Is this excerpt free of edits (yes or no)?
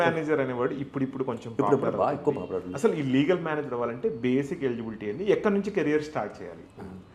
yes